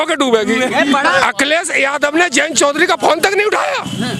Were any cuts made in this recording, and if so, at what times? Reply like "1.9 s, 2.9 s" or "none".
1.2 s